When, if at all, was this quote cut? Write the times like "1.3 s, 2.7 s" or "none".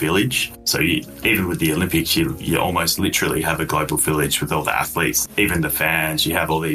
5.2 s